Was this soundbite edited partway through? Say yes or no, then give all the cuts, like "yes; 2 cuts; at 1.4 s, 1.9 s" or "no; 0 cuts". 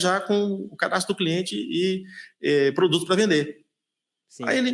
no; 0 cuts